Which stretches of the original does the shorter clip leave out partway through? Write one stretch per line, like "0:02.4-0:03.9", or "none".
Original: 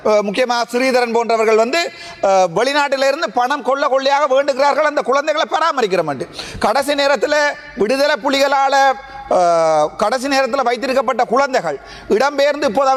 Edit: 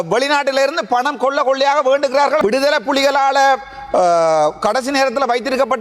0:04.8-0:07.8